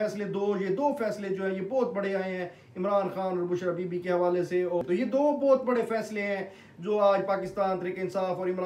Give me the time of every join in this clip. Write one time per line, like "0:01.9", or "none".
0:04.8